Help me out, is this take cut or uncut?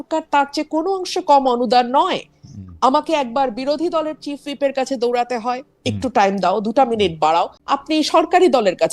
cut